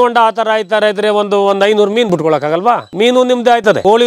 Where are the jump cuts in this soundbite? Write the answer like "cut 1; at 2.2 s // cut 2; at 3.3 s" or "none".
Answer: none